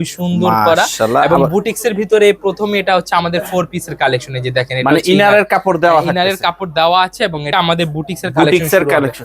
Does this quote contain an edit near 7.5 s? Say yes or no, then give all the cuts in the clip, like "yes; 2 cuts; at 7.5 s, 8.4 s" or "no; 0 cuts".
yes; 1 cut; at 7.5 s